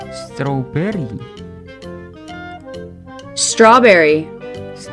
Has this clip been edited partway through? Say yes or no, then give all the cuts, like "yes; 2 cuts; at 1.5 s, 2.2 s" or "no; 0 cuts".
no; 0 cuts